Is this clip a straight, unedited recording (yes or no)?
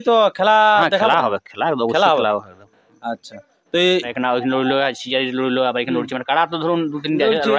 no